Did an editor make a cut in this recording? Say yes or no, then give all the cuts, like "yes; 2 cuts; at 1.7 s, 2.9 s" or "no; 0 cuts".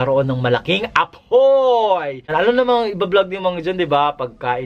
yes; 1 cut; at 2.3 s